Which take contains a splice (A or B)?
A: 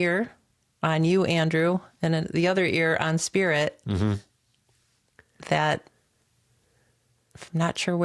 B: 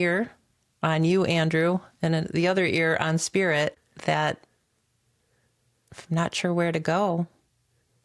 B